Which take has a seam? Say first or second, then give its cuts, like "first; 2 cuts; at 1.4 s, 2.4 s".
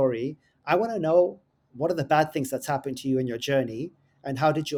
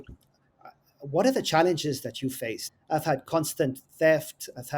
second; 1 cut; at 2.6 s